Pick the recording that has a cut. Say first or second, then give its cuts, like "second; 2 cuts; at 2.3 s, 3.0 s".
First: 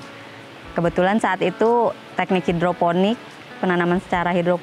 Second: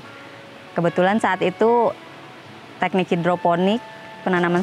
first; 1 cut; at 2.1 s